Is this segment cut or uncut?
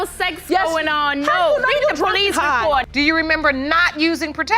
cut